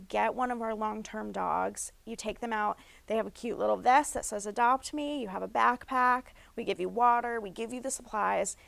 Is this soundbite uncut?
yes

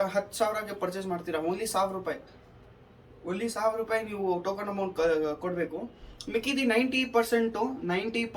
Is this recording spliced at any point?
no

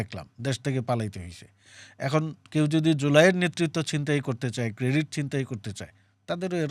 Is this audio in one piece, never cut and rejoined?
yes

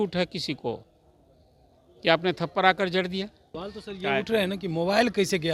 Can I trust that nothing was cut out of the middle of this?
no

